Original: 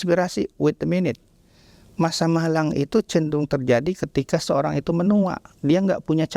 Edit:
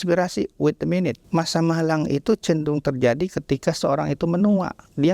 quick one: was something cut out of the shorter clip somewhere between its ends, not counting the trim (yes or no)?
yes